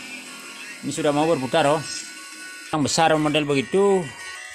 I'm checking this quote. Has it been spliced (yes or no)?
yes